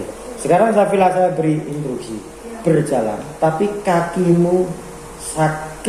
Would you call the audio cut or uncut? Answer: uncut